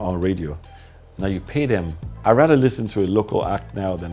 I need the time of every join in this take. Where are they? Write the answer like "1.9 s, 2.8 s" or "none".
2.0 s